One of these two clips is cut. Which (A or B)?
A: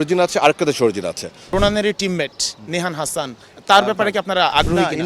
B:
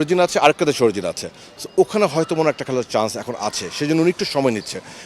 A